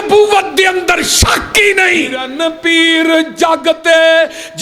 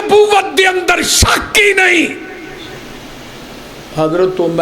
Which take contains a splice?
first; 1 cut; at 2.2 s

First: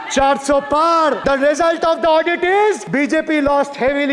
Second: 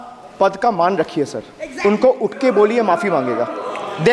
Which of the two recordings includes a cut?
first; 2 cuts; at 1.2 s, 2.8 s

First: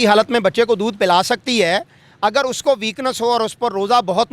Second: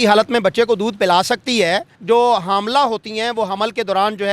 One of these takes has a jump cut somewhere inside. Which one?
second; 1 cut; at 1.9 s

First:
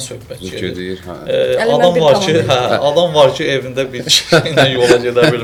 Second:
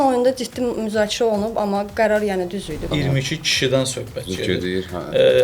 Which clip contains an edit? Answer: second; 1 cut; at 2.9 s

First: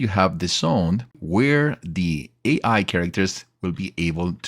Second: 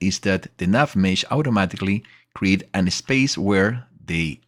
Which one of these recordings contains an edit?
first; 1 cut; at 1.2 s

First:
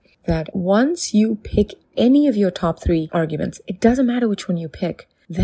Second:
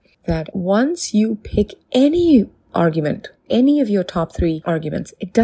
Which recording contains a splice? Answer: first; 1 cut; at 1.8 s

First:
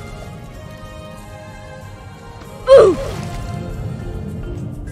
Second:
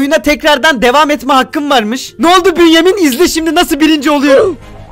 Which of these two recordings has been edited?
second; 1 cut; at 2.2 s

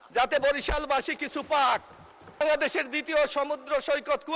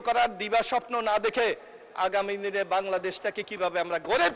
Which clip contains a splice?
first; 1 cut; at 2.4 s

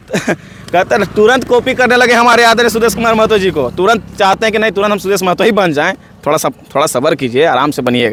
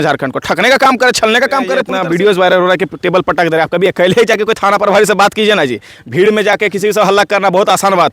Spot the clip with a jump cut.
second; 1 cut; at 1.9 s

